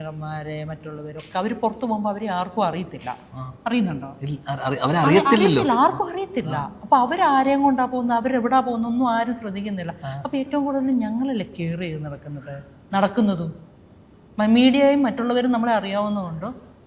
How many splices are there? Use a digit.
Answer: 0